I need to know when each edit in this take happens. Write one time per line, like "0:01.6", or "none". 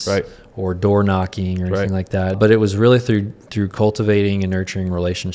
0:02.4